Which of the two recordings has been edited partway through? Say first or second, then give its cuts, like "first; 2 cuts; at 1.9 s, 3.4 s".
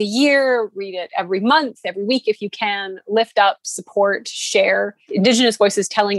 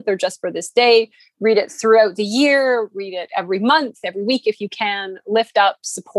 first; 1 cut; at 5.0 s